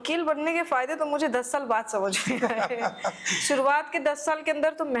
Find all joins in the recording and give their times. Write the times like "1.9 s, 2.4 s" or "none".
none